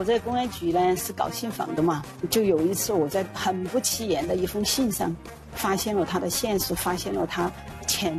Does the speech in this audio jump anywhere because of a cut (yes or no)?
no